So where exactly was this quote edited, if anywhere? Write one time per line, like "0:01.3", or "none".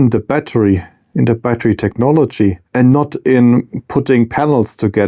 0:02.6